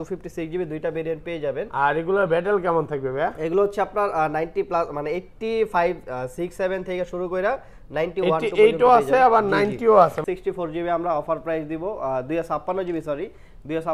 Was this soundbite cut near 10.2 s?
yes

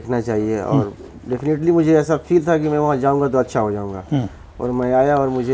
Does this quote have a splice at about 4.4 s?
no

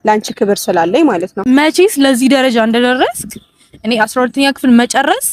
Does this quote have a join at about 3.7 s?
no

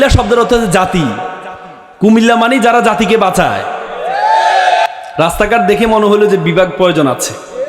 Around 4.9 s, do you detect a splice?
yes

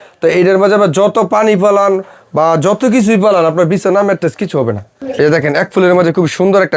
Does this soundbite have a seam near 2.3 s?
no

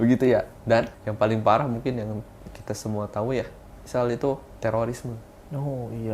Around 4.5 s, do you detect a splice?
yes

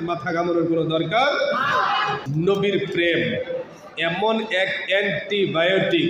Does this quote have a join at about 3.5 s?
no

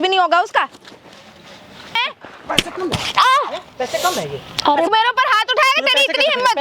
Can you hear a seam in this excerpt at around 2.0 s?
yes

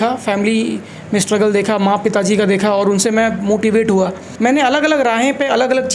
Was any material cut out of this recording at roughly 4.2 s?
yes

